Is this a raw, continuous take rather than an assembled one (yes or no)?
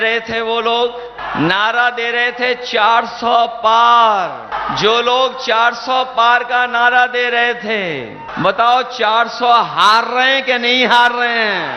no